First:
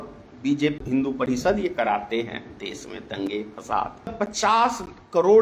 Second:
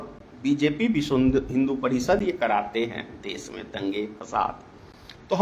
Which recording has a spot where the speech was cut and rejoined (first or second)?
first